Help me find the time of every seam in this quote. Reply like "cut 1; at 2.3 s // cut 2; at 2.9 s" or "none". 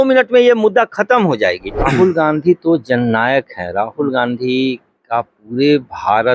cut 1; at 1.8 s